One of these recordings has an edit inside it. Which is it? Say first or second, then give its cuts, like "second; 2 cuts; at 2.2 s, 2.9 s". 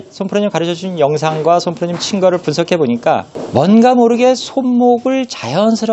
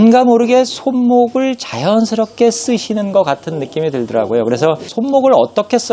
second; 1 cut; at 4.9 s